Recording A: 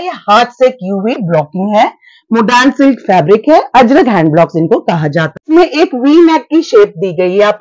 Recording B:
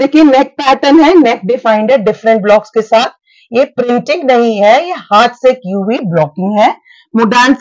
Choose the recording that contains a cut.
A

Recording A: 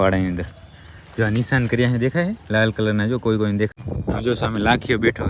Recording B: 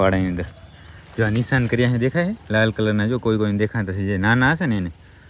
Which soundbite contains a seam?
A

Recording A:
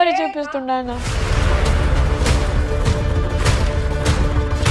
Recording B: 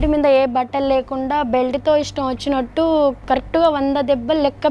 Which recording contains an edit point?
A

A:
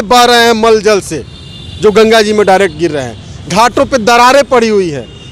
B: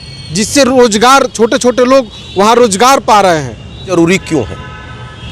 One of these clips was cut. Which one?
B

